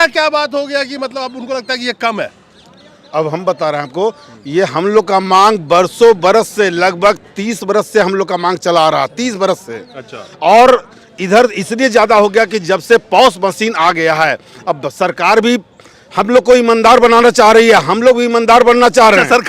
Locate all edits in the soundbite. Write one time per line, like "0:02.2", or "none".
none